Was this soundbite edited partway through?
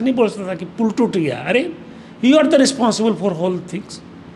no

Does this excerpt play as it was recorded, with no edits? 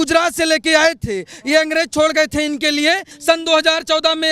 no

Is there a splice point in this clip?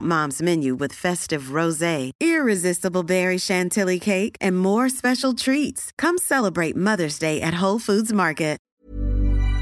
yes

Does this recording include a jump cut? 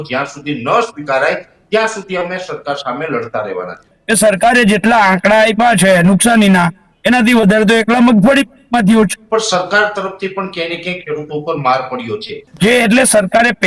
yes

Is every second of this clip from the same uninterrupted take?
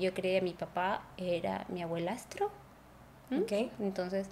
yes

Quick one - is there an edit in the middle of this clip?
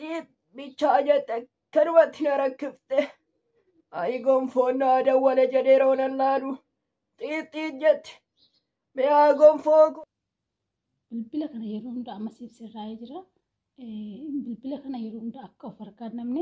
yes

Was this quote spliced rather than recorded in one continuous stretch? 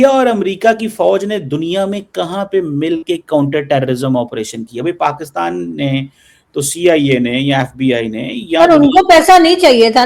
no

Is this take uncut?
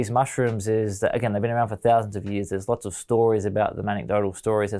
yes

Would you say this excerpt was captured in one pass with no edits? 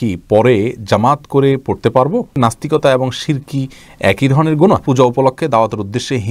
no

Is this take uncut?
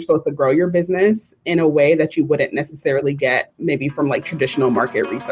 yes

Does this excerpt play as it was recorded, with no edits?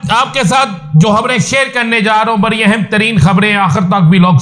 yes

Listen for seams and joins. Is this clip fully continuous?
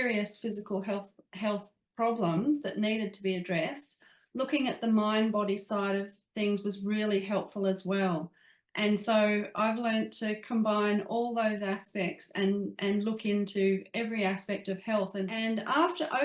no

